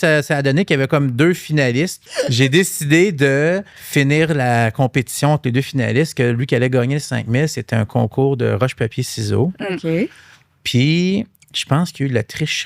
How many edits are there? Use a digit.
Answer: 2